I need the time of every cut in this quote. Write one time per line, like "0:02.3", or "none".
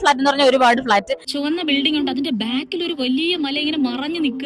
0:01.3

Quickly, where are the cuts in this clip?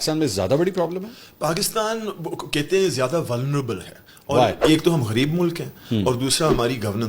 0:04.6

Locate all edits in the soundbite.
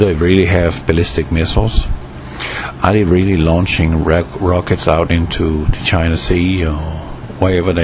0:06.3

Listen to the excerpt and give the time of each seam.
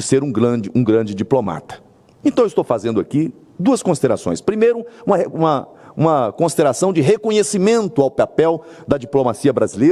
none

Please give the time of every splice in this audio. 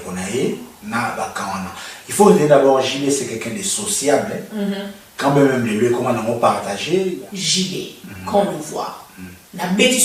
0:07.2

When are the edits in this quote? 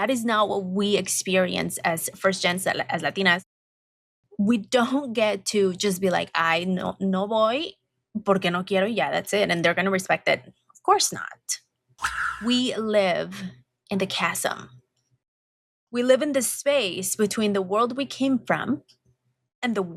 0:12.1

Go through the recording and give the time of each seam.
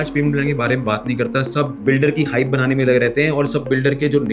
0:01.8

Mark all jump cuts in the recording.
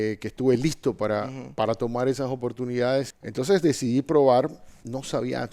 0:03.2

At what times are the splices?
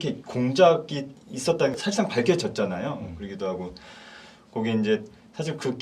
0:01.7

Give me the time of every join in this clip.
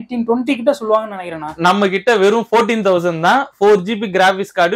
none

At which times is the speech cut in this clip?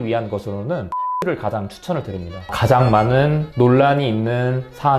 0:02.4

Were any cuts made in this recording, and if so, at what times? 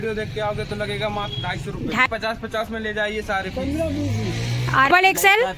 0:02.1
0:04.9

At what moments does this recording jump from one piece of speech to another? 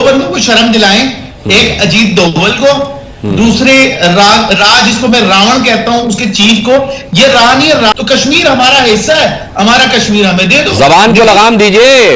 0:07.9

